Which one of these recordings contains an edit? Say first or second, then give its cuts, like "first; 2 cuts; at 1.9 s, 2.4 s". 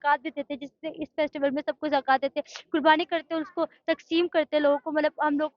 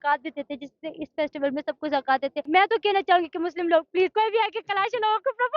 second; 2 cuts; at 2.4 s, 4.1 s